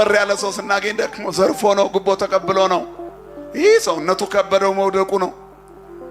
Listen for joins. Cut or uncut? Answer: uncut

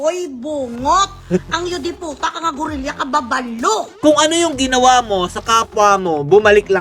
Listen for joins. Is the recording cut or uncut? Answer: cut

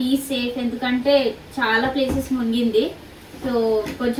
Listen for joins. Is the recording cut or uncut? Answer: uncut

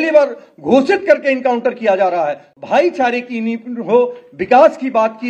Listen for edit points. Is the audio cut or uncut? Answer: cut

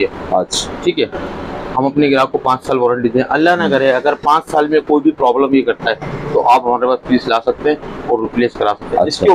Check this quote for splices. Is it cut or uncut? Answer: uncut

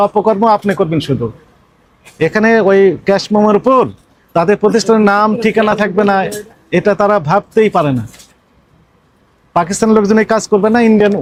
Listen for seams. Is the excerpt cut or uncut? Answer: uncut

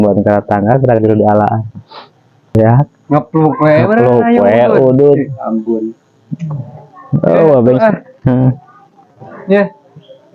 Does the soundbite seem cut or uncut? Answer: cut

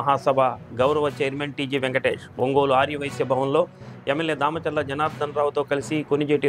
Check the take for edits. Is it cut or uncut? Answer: uncut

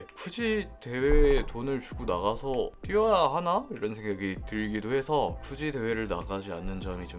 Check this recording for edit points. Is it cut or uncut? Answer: uncut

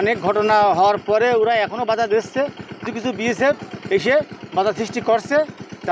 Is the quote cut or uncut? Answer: cut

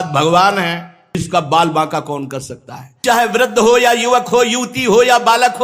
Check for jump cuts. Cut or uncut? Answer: cut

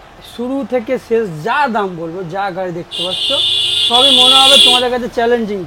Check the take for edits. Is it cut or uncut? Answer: uncut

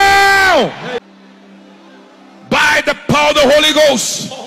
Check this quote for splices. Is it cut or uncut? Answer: cut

